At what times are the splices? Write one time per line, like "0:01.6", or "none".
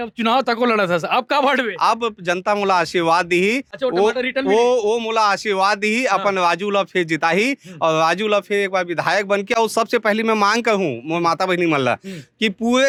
none

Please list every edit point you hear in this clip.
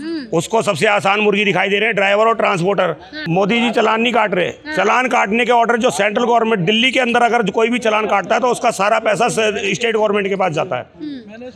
0:03.1

